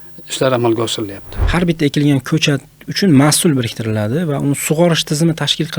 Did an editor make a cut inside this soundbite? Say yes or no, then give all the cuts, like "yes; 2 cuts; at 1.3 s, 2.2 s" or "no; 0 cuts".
yes; 1 cut; at 1.3 s